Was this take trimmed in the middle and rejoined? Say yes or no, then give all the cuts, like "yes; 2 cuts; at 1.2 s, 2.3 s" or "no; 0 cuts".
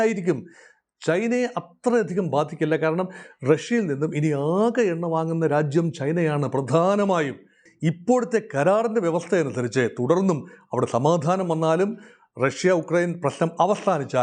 yes; 1 cut; at 7.7 s